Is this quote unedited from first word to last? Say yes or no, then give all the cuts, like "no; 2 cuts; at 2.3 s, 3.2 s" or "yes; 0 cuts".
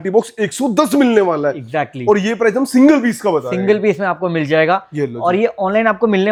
yes; 0 cuts